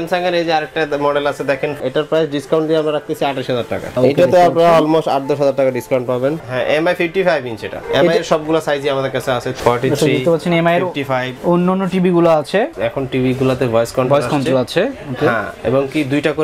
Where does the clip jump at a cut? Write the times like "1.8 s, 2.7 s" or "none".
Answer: 1.8 s, 3.9 s, 6.4 s, 9.5 s, 12.7 s